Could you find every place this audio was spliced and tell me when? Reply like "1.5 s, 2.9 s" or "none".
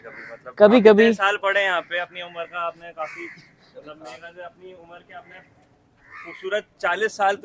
none